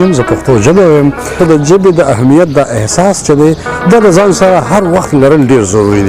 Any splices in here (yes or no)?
yes